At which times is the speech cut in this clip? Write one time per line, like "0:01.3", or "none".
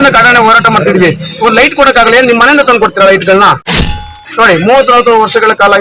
0:03.7